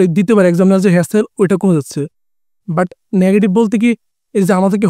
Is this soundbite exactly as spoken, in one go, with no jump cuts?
yes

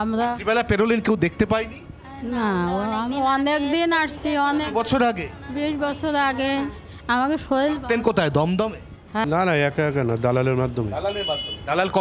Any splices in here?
yes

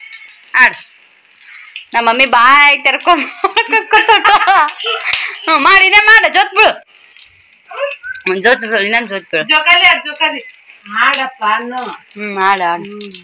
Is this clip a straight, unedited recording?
yes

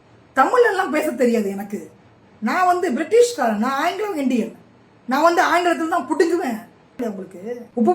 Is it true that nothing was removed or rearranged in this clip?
no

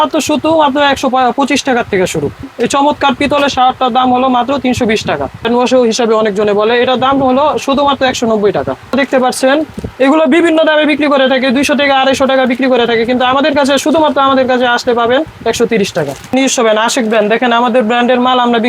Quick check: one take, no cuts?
no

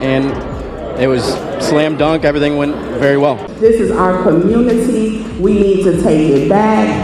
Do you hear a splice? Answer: yes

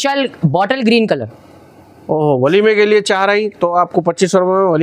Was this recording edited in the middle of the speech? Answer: no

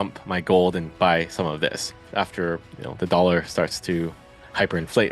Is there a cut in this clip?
yes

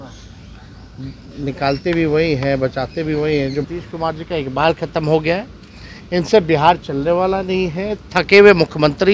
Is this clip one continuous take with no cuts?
no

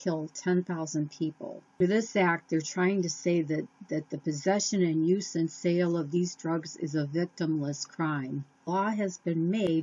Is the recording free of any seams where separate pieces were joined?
no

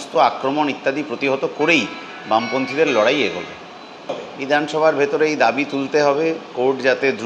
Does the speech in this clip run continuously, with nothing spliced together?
no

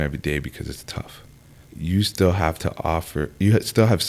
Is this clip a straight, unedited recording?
no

